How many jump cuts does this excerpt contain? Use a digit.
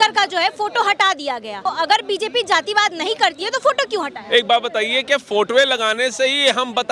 1